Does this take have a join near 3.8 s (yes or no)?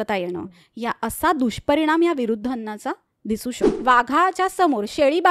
yes